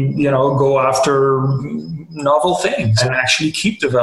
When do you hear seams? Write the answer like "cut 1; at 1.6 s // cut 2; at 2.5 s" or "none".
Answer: cut 1; at 3.0 s